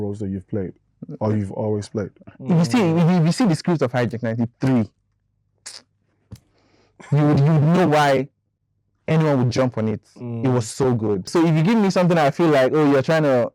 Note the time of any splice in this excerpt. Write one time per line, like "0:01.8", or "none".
0:02.2
0:11.3